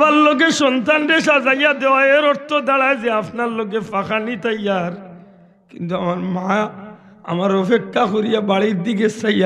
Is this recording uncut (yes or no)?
yes